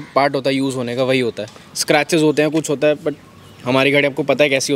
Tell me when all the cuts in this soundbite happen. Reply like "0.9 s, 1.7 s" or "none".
none